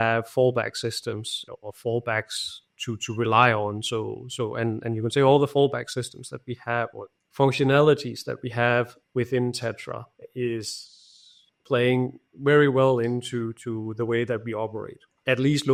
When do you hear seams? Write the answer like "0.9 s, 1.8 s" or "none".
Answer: none